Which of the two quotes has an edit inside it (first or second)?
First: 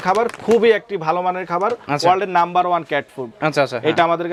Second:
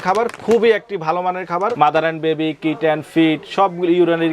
second